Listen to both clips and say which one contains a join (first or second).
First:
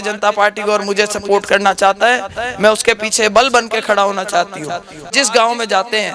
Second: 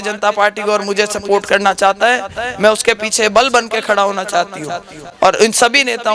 first